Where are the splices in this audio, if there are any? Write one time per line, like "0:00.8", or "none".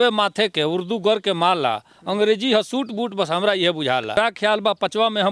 0:04.2